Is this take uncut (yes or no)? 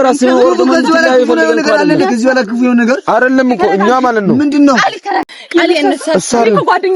no